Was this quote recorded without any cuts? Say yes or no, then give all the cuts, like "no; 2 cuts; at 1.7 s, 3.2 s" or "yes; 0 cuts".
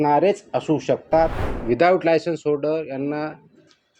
no; 1 cut; at 1.4 s